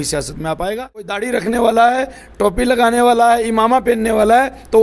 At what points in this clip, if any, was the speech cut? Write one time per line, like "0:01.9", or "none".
0:01.2